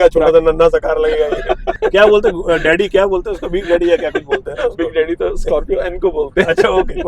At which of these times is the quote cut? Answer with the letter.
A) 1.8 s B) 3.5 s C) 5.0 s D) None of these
A